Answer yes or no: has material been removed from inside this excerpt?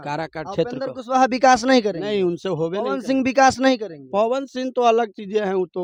no